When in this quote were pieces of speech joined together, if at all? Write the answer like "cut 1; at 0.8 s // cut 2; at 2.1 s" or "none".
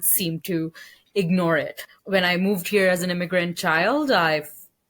cut 1; at 1.8 s